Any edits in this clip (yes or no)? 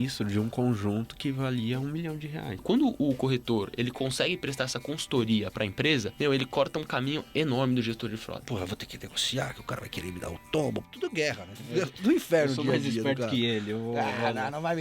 yes